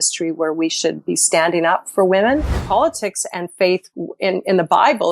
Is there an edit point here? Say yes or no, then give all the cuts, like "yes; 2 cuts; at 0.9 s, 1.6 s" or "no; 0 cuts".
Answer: yes; 1 cut; at 2.5 s